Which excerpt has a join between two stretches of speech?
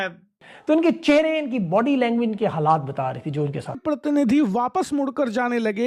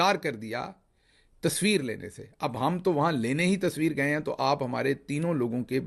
first; 1 cut; at 3.8 s

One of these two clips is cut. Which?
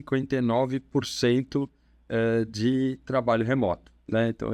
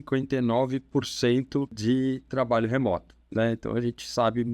second; 1 cut; at 1.8 s

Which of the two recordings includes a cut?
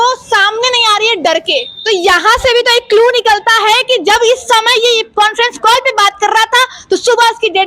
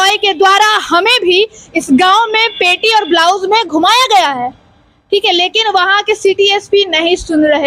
first; 1 cut; at 1.7 s

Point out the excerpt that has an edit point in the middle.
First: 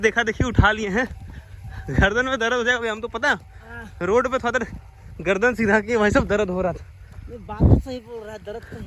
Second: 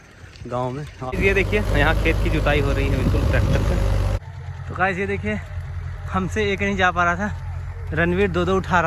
second; 2 cuts; at 1.1 s, 4.2 s

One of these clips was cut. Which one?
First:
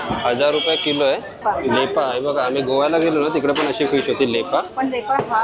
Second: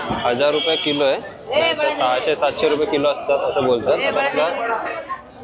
first; 1 cut; at 1.4 s

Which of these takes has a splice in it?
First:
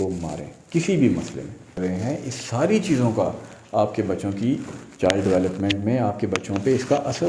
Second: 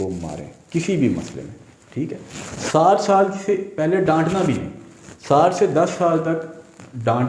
first; 1 cut; at 1.8 s

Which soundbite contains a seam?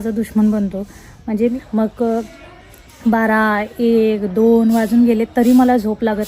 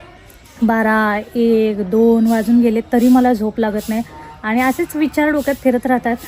first; 1 cut; at 1.4 s

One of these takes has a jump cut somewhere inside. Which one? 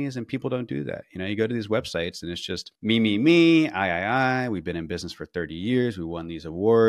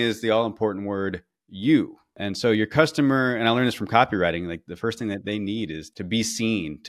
second; 3 cuts; at 2.2 s, 4.6 s, 5.8 s

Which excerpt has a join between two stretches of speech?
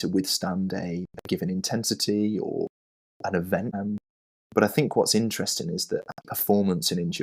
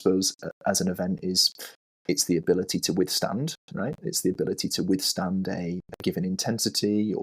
first; 2 cuts; at 3.8 s, 6.2 s

